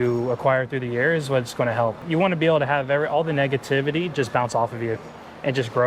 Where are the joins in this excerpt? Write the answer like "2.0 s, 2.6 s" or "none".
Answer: 2.0 s